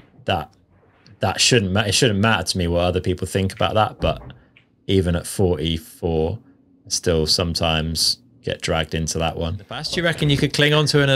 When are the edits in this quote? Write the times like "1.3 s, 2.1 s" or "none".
9.9 s